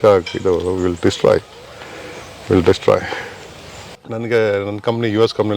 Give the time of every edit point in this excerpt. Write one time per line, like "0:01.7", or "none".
0:03.9